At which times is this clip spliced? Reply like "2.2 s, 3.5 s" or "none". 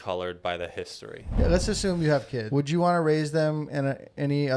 1.2 s, 2.4 s